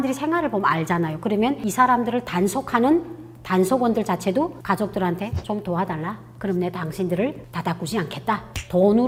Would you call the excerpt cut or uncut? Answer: uncut